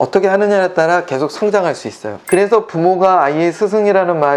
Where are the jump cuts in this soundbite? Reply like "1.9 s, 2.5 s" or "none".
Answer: 2.1 s